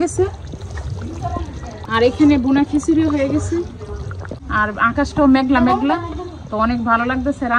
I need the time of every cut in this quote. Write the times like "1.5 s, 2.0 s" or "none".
1.9 s, 4.4 s